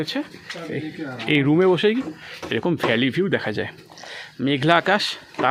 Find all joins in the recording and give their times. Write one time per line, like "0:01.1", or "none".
none

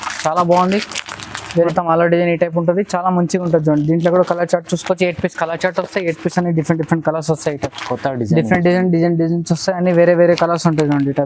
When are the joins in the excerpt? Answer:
0:01.5

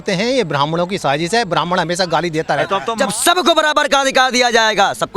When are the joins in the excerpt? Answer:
0:02.9

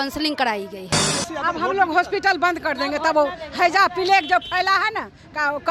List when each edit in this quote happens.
0:01.1

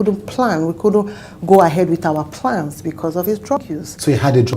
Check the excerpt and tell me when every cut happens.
0:03.6

